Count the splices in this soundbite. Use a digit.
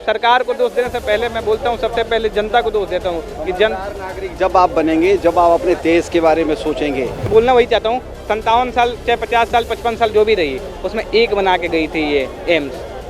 1